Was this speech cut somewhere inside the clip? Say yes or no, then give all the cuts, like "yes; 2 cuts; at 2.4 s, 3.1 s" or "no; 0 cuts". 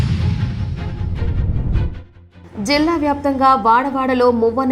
no; 0 cuts